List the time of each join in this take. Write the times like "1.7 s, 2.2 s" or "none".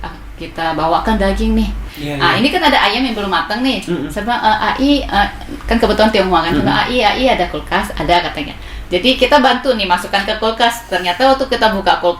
1.8 s